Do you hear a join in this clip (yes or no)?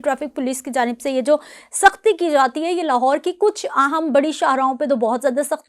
no